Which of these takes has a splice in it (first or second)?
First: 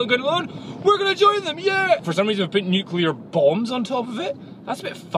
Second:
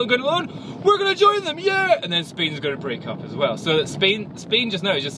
first